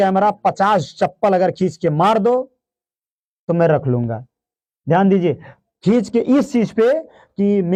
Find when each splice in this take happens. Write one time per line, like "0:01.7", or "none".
none